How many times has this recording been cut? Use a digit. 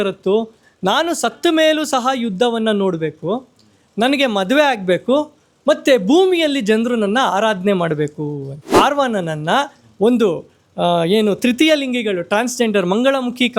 1